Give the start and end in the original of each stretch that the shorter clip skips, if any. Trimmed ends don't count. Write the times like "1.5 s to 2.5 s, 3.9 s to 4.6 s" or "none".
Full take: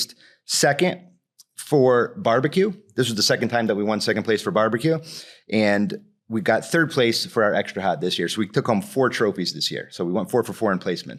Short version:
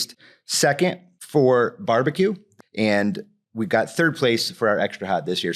1.1 s to 1.5 s, 2.8 s to 5.2 s